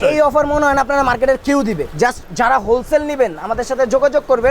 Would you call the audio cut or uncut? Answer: cut